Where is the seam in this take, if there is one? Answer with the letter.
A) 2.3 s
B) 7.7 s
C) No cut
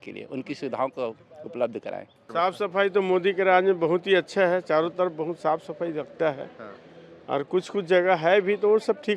A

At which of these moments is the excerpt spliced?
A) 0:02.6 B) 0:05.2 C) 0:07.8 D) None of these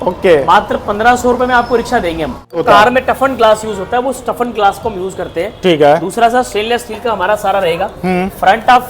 A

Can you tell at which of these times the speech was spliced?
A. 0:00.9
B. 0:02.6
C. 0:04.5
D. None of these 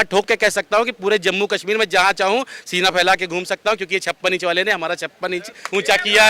D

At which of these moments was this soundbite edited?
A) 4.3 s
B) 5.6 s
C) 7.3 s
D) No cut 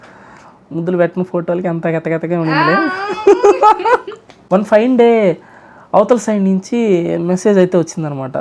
A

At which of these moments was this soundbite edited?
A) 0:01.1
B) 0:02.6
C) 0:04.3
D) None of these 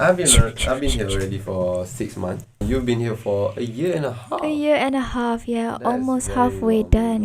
B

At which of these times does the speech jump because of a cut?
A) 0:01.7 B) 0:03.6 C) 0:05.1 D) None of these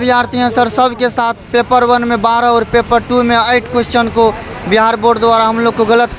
D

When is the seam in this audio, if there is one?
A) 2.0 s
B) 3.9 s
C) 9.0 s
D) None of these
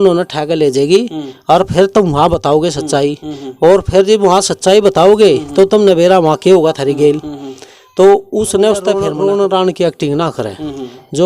C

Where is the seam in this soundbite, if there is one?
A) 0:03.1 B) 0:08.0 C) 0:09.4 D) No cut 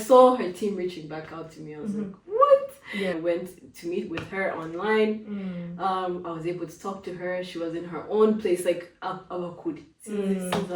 A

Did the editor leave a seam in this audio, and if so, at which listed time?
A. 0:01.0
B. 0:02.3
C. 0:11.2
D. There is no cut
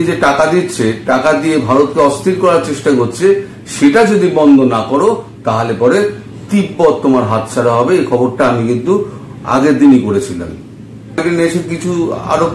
C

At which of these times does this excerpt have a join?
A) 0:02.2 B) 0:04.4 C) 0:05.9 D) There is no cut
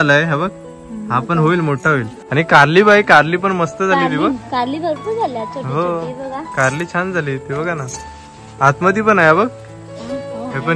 A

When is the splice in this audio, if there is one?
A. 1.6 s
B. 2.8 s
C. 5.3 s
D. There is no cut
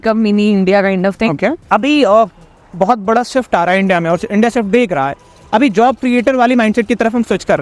A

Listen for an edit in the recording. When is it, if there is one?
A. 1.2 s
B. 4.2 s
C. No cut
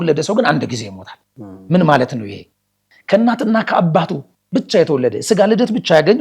C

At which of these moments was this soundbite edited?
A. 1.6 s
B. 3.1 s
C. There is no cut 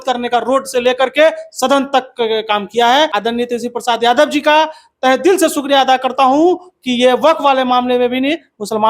B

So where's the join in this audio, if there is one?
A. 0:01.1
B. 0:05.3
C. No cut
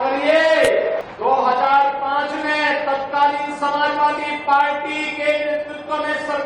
A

